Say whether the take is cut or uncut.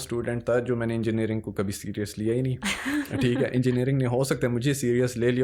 uncut